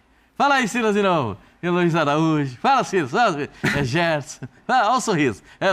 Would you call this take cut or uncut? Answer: uncut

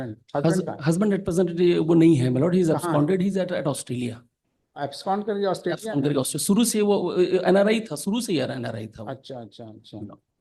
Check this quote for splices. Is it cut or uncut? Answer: uncut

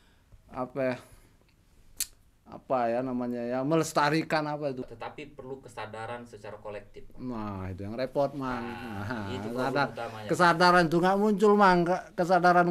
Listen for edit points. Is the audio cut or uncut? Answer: cut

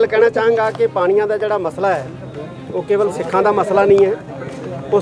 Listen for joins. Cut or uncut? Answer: uncut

